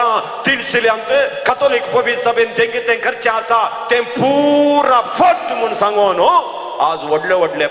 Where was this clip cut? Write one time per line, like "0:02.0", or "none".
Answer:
none